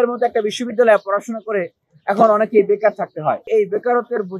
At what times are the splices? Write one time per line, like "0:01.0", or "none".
0:03.5